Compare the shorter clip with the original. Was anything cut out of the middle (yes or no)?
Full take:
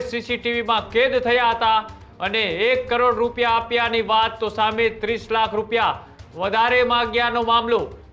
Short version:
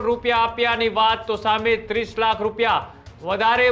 no